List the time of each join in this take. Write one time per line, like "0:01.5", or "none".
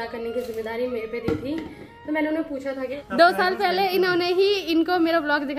0:02.9